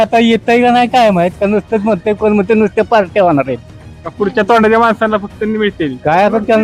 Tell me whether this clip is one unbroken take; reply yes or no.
yes